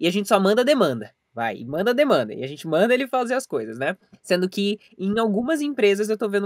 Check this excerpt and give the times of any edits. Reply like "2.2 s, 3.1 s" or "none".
none